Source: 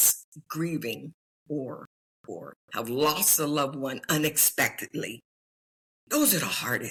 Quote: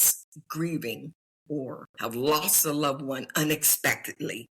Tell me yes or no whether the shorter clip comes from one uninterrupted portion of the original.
no